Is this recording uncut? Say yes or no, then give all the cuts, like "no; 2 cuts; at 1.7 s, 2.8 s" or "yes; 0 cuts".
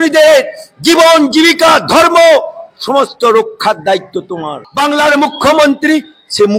no; 1 cut; at 4.7 s